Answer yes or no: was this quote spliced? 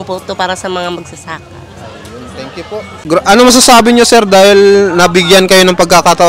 yes